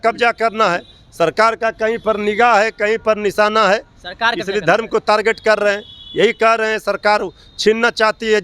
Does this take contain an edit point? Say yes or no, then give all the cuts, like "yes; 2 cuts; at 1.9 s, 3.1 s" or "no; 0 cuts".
no; 0 cuts